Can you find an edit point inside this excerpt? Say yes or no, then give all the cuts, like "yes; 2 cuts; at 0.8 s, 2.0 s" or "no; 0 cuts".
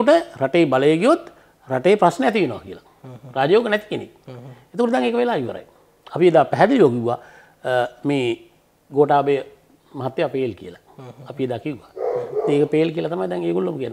no; 0 cuts